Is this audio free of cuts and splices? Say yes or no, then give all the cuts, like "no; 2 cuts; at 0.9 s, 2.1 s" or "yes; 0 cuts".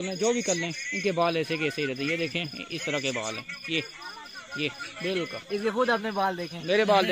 yes; 0 cuts